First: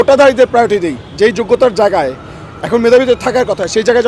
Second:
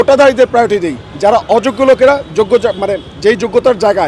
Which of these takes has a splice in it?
first; 1 cut; at 1.0 s

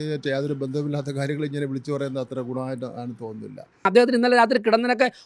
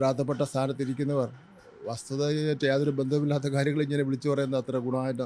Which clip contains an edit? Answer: first; 1 cut; at 3.9 s

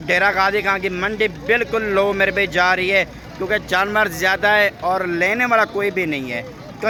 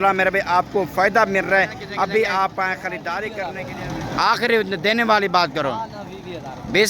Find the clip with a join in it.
second; 1 cut; at 3.3 s

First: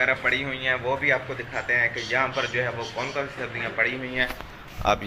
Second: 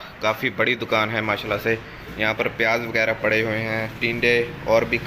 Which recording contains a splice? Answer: second; 1 cut; at 3.9 s

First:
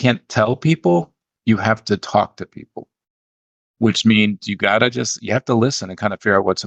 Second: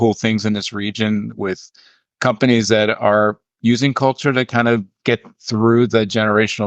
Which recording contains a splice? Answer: second; 1 cut; at 4.9 s

